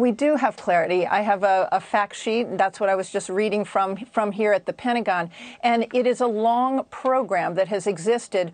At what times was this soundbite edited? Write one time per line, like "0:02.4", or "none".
0:04.0